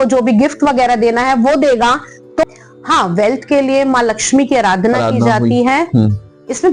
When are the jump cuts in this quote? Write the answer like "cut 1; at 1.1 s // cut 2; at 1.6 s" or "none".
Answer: cut 1; at 2.4 s